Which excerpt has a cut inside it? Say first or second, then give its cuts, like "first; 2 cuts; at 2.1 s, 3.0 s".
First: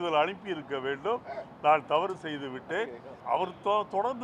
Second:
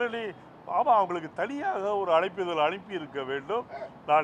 first; 1 cut; at 3.1 s